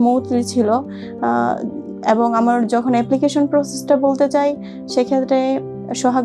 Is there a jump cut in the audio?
no; 0 cuts

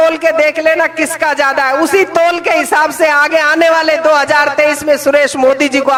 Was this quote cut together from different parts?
no; 0 cuts

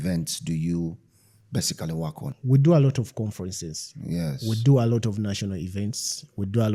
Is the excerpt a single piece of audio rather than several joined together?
yes; 0 cuts

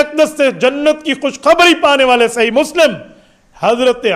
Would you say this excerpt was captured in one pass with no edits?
yes; 0 cuts

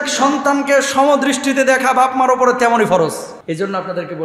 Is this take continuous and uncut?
no; 1 cut; at 3.3 s

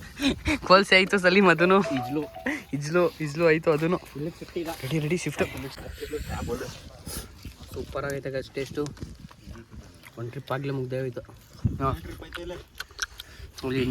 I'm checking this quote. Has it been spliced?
yes; 1 cut; at 5.8 s

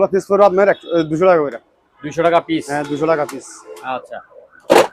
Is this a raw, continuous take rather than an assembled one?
yes; 0 cuts

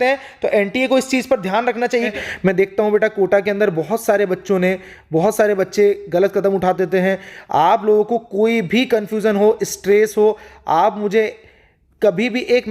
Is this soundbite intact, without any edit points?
no; 1 cut; at 2.1 s

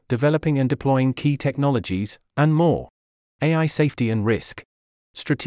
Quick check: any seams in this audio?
yes; 1 cut; at 2.7 s

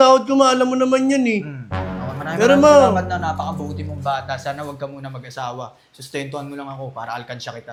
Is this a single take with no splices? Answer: yes; 0 cuts

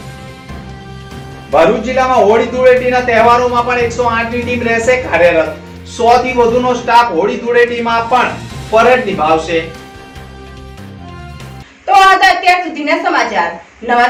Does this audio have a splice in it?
no; 0 cuts

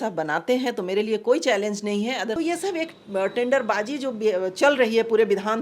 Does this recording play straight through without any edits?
no; 1 cut; at 2.4 s

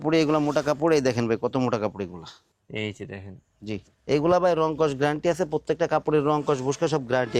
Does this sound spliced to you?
no; 0 cuts

